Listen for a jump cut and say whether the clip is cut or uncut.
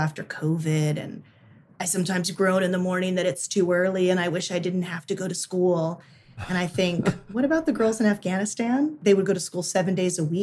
cut